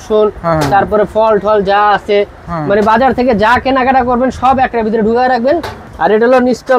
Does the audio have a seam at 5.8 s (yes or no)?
yes